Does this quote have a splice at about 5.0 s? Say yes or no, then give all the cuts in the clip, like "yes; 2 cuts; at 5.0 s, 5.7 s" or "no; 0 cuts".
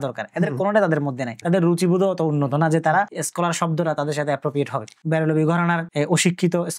yes; 1 cut; at 5.0 s